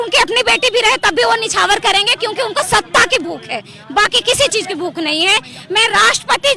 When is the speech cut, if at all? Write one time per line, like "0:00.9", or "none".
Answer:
none